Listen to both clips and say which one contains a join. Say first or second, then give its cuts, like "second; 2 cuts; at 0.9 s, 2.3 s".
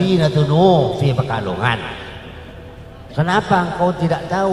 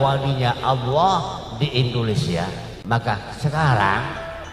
second; 1 cut; at 2.7 s